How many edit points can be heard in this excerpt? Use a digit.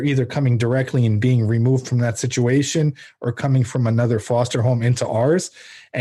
0